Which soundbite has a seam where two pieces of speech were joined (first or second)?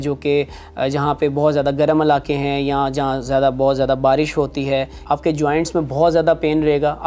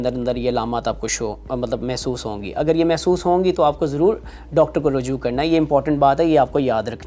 first